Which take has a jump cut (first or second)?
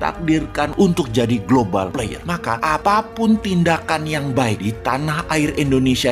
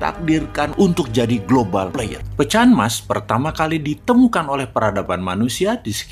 second